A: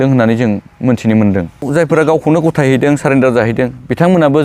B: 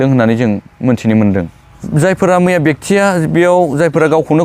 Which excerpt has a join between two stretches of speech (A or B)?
A